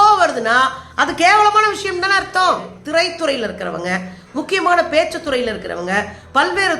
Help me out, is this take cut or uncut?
cut